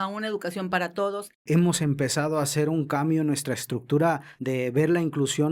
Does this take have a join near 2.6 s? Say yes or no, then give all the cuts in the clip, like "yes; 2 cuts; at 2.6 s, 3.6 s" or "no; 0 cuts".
no; 2 cuts; at 1.3 s, 4.3 s